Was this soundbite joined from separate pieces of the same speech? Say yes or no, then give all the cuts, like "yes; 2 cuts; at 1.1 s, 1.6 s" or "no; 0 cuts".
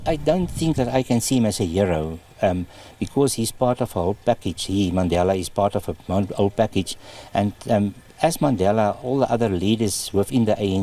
no; 0 cuts